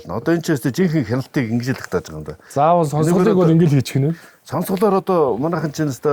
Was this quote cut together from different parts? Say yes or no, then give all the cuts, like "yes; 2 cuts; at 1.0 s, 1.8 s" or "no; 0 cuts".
no; 0 cuts